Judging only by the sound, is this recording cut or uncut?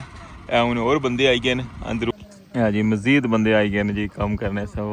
cut